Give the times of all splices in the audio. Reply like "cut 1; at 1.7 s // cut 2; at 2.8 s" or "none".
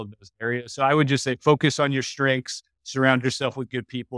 none